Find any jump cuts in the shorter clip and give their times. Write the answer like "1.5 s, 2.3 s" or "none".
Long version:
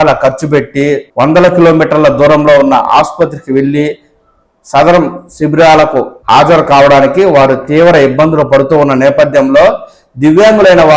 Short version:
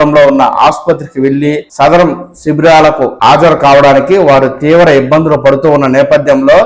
1.7 s, 3.1 s